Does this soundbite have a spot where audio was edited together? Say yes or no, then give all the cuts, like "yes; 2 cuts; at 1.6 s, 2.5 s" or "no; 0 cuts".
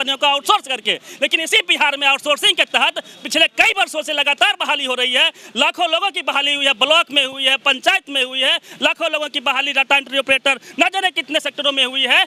no; 0 cuts